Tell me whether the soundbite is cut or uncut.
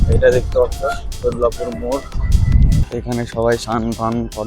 cut